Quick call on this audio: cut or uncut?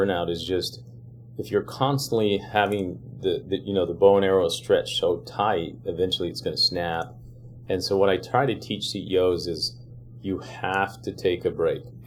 uncut